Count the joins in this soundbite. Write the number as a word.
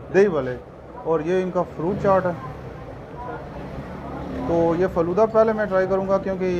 zero